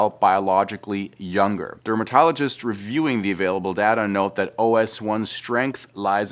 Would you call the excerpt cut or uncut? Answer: cut